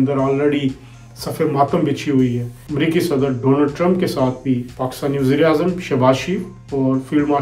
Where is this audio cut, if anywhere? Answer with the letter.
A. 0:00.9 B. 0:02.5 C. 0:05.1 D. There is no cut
B